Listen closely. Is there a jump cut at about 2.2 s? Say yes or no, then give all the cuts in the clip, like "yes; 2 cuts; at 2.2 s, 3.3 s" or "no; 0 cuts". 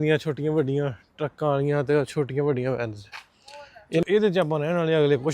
no; 1 cut; at 4.0 s